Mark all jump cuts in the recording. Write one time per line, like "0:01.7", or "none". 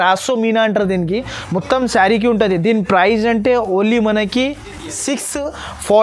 none